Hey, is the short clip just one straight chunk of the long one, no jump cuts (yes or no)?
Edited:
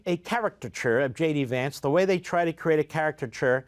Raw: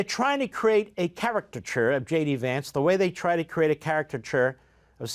yes